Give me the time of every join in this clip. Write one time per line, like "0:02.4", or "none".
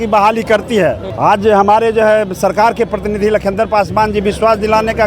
0:01.1